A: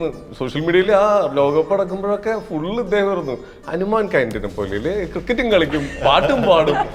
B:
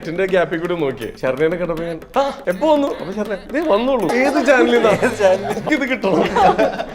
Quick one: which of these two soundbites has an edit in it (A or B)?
B